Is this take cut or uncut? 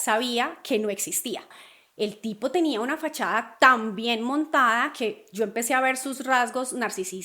cut